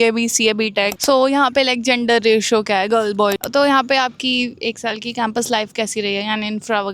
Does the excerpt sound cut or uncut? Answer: cut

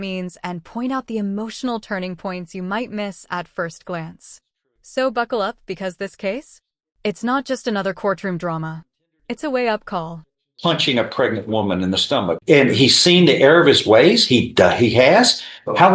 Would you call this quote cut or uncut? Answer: cut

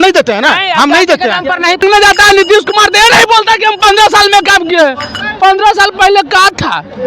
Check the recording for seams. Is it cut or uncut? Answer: cut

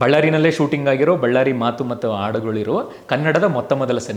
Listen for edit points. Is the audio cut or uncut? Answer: uncut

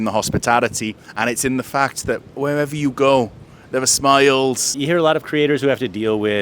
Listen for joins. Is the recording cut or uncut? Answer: cut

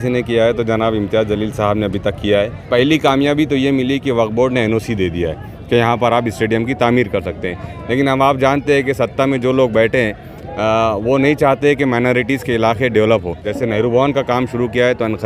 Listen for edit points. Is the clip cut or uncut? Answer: cut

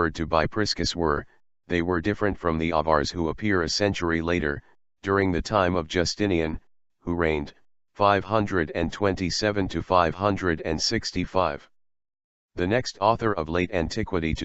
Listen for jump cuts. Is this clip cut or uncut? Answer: cut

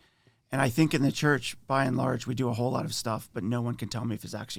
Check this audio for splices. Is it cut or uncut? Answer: uncut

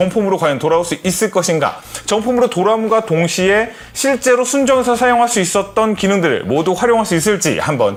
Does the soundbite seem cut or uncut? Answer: uncut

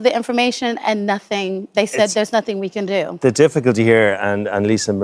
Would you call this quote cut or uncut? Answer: uncut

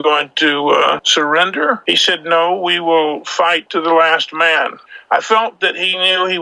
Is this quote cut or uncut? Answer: cut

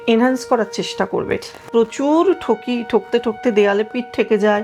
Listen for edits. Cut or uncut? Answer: cut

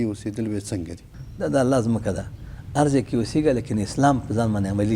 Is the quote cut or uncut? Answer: cut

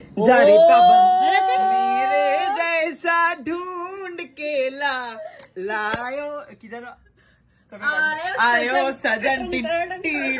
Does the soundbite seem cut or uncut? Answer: uncut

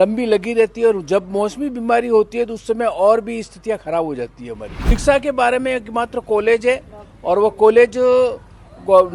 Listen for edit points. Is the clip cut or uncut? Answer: cut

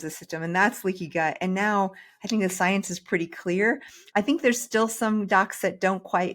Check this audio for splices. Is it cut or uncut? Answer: uncut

